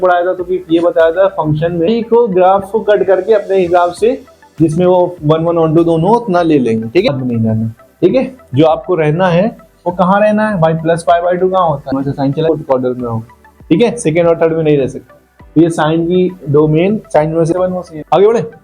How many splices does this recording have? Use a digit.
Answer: 4